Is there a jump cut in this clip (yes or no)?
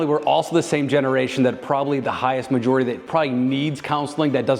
yes